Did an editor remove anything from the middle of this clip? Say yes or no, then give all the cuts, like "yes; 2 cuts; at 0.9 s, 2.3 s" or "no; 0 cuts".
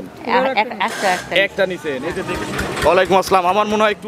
yes; 1 cut; at 2.2 s